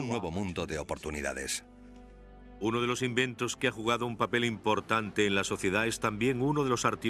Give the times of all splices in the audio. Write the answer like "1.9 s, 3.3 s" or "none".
5.5 s